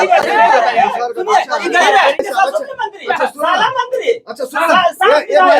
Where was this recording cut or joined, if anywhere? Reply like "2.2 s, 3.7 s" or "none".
2.2 s